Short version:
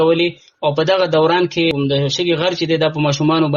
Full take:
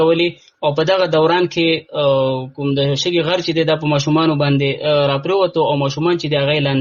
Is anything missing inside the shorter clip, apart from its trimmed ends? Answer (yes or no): yes